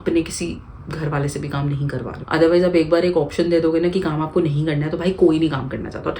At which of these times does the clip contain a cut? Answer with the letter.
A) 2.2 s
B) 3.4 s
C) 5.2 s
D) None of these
A